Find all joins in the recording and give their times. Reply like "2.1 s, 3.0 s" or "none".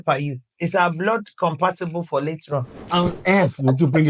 2.9 s